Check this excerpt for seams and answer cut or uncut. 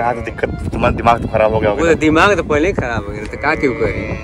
uncut